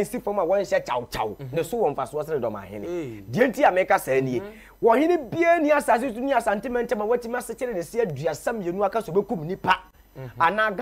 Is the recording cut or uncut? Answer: uncut